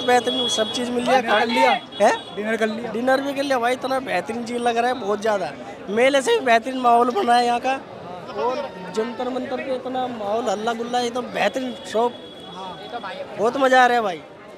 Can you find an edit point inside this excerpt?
no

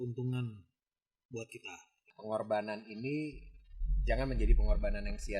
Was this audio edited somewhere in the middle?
yes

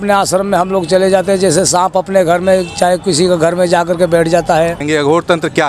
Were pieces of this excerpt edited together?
yes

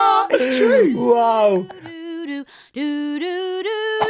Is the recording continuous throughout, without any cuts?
no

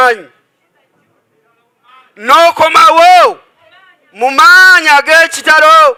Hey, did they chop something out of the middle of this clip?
no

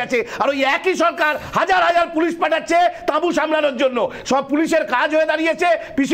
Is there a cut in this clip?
no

